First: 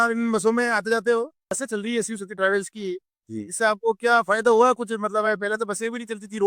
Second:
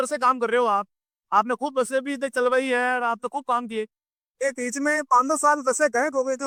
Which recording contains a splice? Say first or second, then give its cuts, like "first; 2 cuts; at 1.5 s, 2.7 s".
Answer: first; 1 cut; at 1.5 s